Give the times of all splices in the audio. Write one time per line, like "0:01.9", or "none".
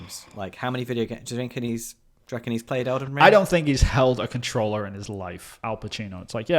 0:05.5